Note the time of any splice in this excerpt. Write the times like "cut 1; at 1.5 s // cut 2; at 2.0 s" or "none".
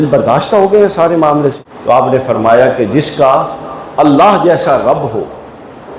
cut 1; at 1.7 s

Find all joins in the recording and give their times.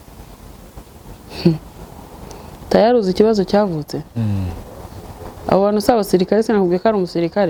none

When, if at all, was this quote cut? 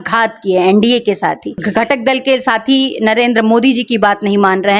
cut 1; at 1.6 s

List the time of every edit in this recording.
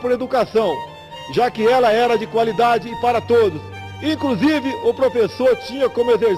cut 1; at 2.2 s

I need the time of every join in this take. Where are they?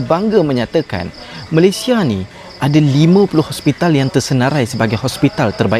none

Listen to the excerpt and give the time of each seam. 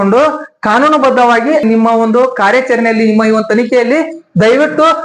cut 1; at 1.6 s

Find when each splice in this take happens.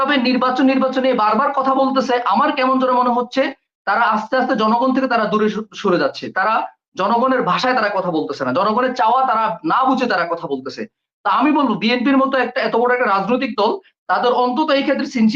none

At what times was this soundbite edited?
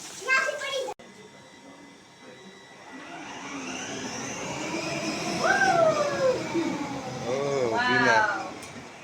cut 1; at 1.0 s

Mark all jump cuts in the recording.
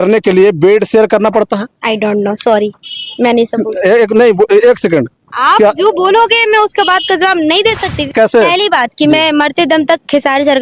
cut 1; at 8.1 s

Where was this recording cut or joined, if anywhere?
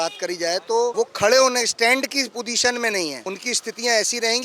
cut 1; at 0.9 s // cut 2; at 3.2 s

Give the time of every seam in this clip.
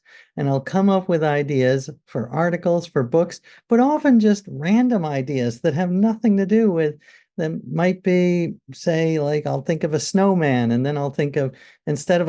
none

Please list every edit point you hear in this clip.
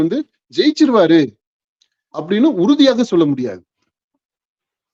none

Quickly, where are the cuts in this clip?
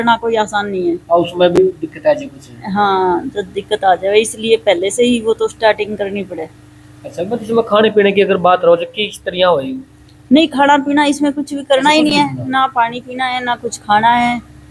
none

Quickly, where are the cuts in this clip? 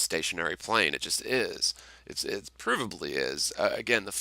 cut 1; at 2.3 s

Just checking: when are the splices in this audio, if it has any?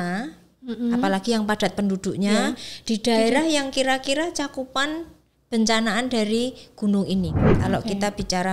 cut 1; at 7.4 s

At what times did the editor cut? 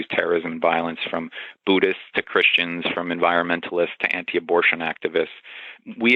none

